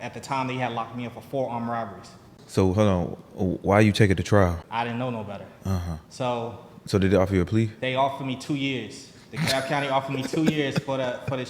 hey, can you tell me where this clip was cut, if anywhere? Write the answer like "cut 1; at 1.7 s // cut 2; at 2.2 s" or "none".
cut 1; at 2.3 s // cut 2; at 4.7 s